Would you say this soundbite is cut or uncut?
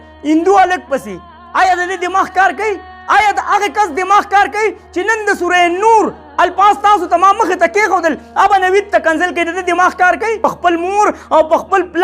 cut